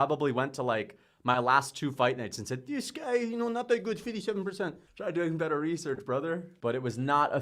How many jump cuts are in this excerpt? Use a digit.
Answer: 2